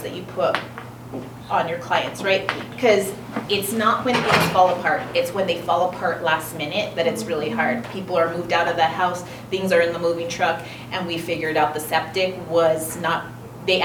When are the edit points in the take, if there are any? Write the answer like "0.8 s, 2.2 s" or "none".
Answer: none